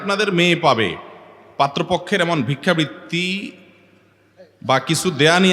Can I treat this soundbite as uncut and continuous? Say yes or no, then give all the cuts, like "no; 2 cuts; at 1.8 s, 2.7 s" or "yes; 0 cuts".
yes; 0 cuts